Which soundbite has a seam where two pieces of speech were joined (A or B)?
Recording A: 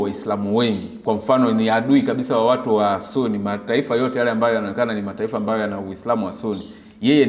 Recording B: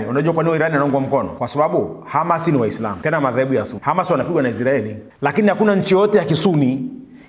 B